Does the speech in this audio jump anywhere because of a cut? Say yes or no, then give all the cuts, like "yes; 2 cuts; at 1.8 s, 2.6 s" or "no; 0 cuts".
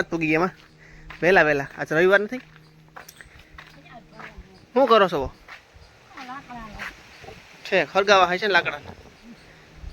no; 0 cuts